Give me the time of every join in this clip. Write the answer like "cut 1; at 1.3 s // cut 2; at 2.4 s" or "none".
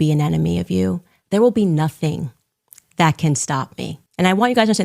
cut 1; at 1.1 s // cut 2; at 4.0 s